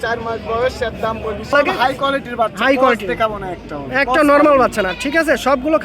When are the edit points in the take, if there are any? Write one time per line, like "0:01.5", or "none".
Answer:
0:01.5